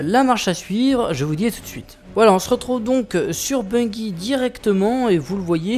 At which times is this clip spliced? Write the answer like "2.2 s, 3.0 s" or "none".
4.4 s